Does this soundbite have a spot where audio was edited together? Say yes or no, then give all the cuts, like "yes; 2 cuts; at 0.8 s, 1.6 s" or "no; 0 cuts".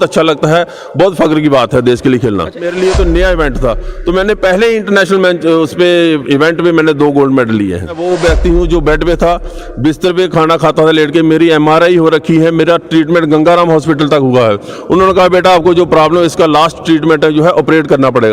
yes; 2 cuts; at 2.6 s, 8.0 s